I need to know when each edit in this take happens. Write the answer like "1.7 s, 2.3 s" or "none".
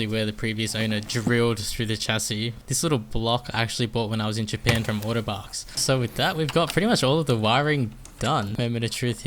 2.6 s, 5.8 s, 8.5 s